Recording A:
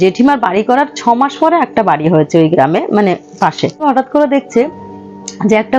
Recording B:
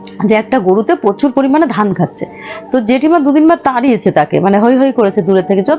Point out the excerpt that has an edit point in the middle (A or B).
A